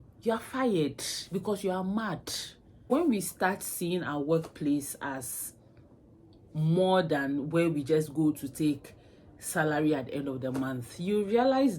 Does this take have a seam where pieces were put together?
yes; 1 cut; at 2.8 s

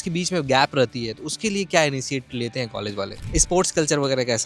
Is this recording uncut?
no; 1 cut; at 3.2 s

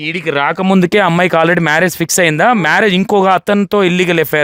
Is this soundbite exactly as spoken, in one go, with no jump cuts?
yes; 0 cuts

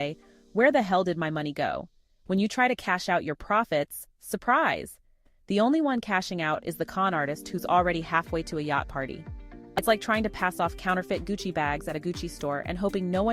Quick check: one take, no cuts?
no; 1 cut; at 9.8 s

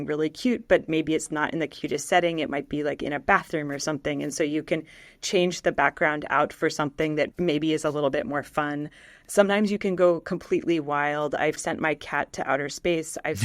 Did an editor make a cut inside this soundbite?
yes; 1 cut; at 11.6 s

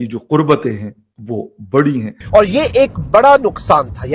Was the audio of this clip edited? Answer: yes; 1 cut; at 2.3 s

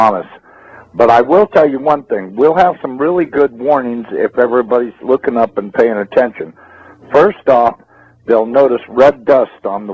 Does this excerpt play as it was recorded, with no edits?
no; 1 cut; at 8.9 s

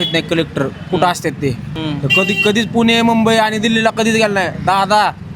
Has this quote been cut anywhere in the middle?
no; 0 cuts

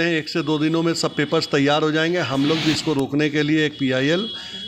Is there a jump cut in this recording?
no; 0 cuts

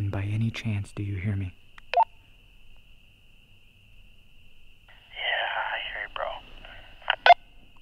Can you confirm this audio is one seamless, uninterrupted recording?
no; 1 cut; at 3.9 s

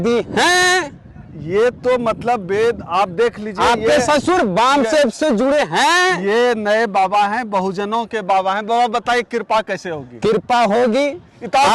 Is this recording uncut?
yes; 0 cuts

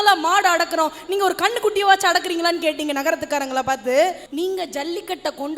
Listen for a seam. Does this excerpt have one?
yes; 1 cut; at 4.2 s

